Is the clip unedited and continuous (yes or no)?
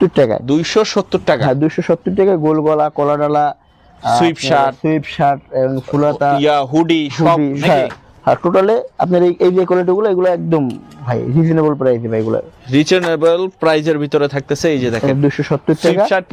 yes